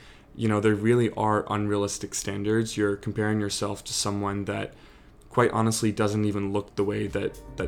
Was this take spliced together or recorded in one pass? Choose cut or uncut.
uncut